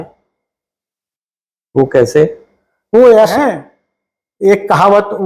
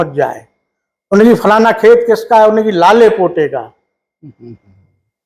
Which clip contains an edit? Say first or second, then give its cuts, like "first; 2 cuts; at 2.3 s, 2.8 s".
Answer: first; 1 cut; at 3.4 s